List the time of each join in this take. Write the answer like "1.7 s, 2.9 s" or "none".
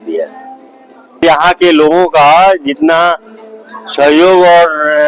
1.2 s